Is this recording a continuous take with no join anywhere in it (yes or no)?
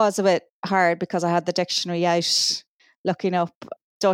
yes